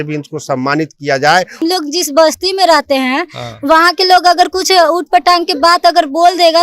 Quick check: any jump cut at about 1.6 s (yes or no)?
yes